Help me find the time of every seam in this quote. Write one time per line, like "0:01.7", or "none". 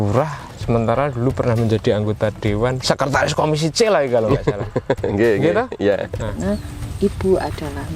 0:06.2